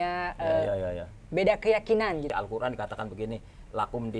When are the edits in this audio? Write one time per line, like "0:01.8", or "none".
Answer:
0:02.3